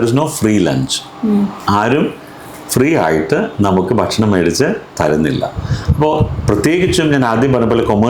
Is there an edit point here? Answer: no; 0 cuts

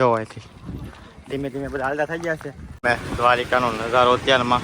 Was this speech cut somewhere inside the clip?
yes; 1 cut; at 2.8 s

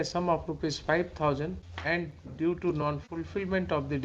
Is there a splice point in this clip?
yes; 1 cut; at 1.7 s

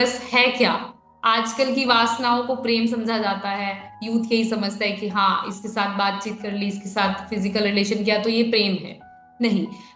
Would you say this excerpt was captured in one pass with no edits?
yes; 0 cuts

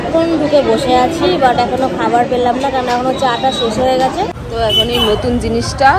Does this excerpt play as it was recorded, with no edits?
no; 1 cut; at 4.4 s

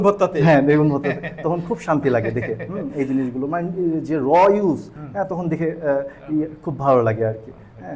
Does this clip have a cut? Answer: no; 0 cuts

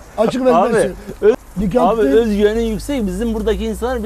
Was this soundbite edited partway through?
yes; 1 cut; at 1.4 s

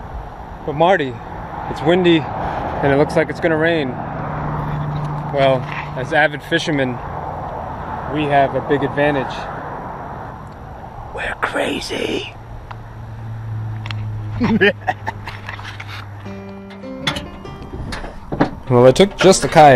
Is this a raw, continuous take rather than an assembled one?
yes; 0 cuts

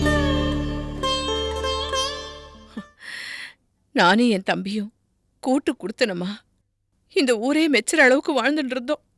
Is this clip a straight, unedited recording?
yes; 0 cuts

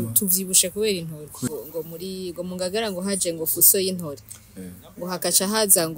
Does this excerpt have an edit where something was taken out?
yes; 1 cut; at 1.5 s

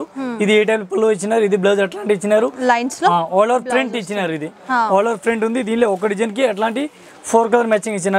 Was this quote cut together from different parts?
no; 0 cuts

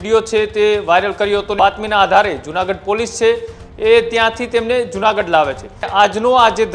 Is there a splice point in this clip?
yes; 2 cuts; at 1.5 s, 5.9 s

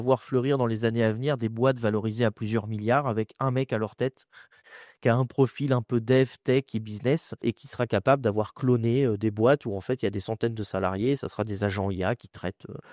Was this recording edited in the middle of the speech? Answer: no; 0 cuts

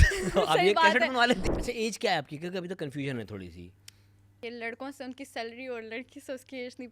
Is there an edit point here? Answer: yes; 2 cuts; at 1.4 s, 4.4 s

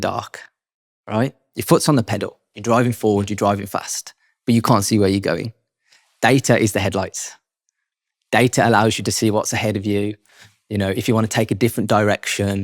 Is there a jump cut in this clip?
yes; 1 cut; at 1.4 s

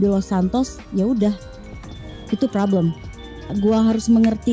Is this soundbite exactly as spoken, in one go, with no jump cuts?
no; 1 cut; at 3.5 s

